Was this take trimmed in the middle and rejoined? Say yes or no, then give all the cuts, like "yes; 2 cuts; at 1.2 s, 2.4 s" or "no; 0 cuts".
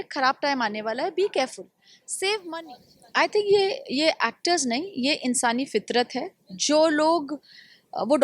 yes; 1 cut; at 2.6 s